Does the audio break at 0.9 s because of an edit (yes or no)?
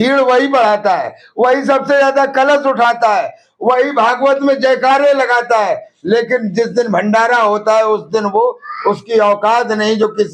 no